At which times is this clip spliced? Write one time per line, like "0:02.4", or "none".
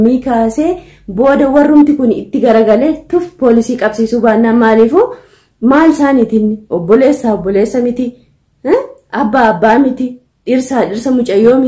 none